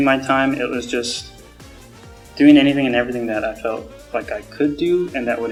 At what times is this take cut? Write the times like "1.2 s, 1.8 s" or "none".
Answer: none